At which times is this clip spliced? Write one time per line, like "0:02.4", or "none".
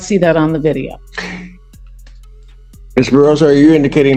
none